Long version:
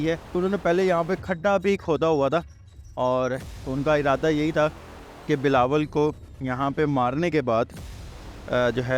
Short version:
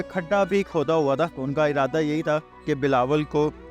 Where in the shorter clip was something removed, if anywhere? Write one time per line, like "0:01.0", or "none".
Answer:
0:01.4
0:02.5